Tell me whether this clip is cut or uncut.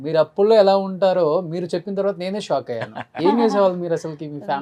uncut